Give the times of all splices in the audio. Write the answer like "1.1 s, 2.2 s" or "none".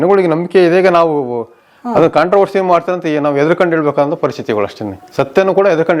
none